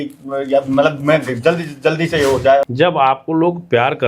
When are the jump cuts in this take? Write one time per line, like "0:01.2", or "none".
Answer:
0:02.6